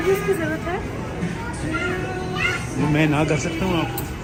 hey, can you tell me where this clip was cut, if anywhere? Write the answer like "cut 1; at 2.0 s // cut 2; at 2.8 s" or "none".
none